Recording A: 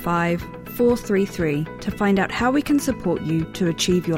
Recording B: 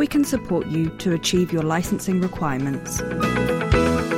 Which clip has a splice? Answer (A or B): B